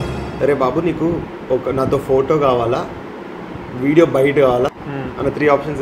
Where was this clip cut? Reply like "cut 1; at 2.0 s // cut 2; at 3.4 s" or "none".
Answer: cut 1; at 4.7 s

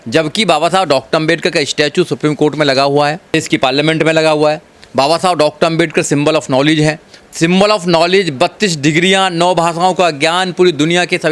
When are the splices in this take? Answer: cut 1; at 7.1 s

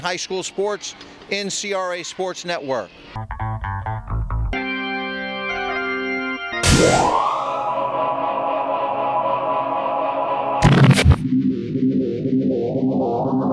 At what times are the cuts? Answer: none

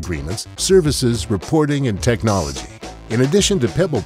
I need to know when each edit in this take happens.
none

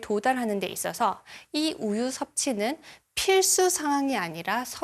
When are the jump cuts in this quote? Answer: none

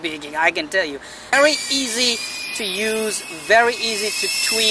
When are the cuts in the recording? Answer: cut 1; at 1.3 s

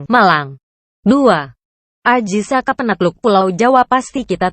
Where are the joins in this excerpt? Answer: cut 1; at 3.4 s

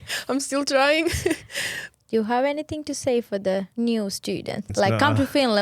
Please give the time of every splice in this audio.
cut 1; at 1.8 s // cut 2; at 3.7 s // cut 3; at 4.7 s

